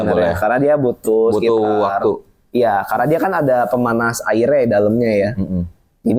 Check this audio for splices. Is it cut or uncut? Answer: uncut